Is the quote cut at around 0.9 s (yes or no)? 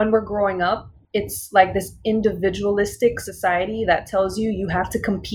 yes